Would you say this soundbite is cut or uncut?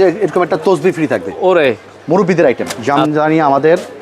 cut